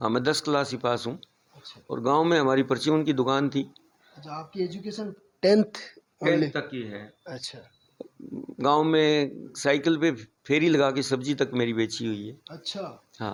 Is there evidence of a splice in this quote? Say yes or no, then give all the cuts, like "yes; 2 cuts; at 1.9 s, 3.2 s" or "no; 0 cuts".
no; 0 cuts